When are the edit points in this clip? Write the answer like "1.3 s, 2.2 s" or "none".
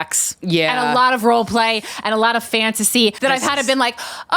3.2 s

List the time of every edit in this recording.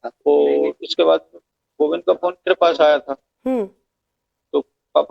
2.0 s

